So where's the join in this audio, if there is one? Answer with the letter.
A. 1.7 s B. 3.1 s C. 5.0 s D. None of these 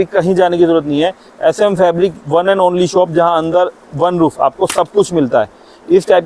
D